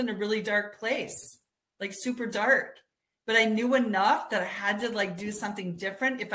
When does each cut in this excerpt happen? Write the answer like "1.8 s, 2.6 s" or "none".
none